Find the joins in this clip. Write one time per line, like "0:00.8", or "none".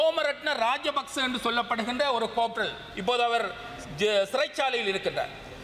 none